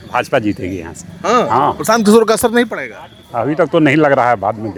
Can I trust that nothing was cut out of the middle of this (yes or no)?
yes